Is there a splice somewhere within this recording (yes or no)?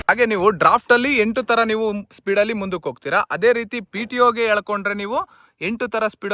no